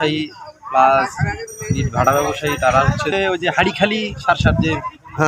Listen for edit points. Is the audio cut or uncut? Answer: cut